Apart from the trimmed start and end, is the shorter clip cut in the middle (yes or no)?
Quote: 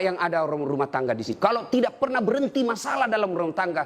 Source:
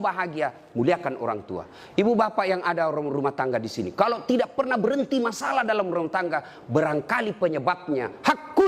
yes